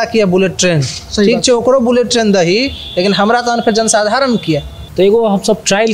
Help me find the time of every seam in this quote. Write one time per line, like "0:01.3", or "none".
0:04.8